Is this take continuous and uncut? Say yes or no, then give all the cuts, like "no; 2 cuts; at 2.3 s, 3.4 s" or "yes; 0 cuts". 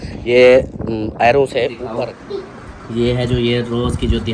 no; 1 cut; at 1.8 s